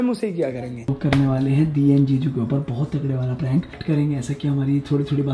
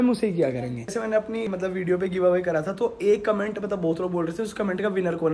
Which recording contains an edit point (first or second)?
first